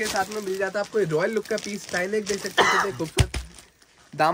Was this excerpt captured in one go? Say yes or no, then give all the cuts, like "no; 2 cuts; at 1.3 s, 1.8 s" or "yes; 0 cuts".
yes; 0 cuts